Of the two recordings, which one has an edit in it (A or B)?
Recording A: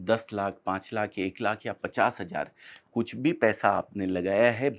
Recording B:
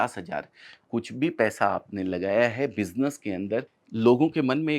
B